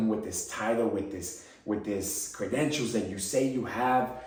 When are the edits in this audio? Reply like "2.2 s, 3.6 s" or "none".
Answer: none